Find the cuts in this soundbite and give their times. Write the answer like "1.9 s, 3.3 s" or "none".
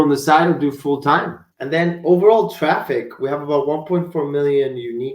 1.4 s